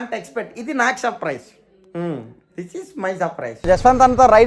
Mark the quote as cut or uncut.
cut